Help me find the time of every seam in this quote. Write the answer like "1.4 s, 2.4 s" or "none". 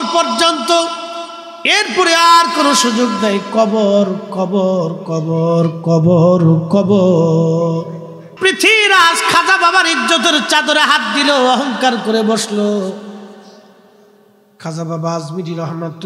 8.3 s